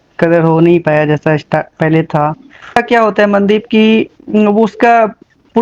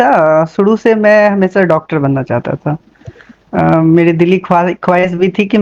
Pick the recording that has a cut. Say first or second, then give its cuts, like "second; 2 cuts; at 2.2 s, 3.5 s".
first; 1 cut; at 2.8 s